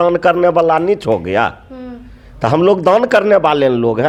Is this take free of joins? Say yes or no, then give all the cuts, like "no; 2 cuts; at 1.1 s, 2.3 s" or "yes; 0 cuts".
yes; 0 cuts